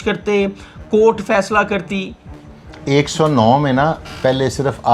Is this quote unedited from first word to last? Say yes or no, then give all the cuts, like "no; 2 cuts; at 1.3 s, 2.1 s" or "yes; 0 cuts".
yes; 0 cuts